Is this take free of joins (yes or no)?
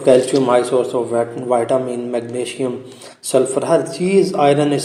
yes